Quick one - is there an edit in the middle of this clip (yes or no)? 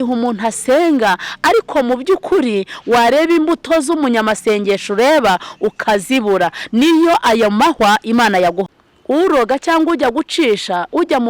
yes